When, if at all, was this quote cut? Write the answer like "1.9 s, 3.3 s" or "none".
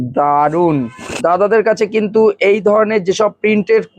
1.2 s